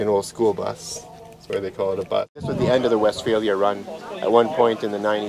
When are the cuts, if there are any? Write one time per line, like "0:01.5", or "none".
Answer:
0:02.4